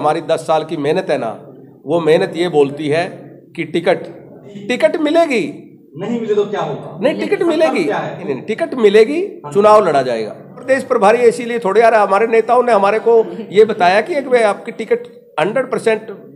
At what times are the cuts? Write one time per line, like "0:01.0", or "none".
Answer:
0:04.6
0:08.3
0:10.6

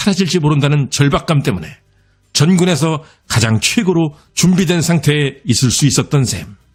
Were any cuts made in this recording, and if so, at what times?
none

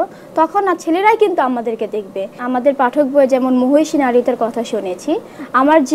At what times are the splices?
0:02.3

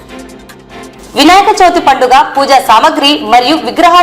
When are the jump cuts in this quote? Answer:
0:01.0

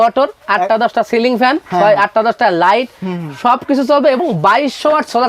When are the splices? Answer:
none

